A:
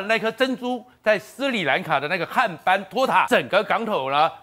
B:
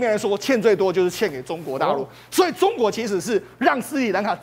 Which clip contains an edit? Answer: A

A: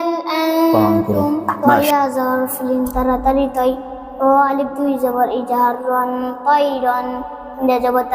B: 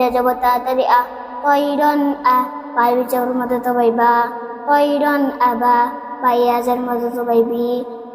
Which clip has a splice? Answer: A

